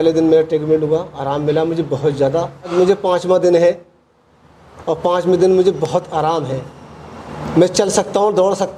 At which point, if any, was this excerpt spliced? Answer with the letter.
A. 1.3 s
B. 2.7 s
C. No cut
B